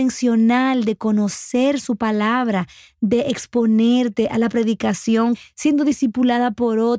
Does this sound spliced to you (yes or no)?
yes